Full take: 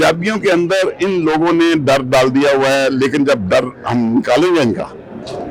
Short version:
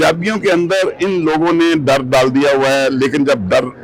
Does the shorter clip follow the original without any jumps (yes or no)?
yes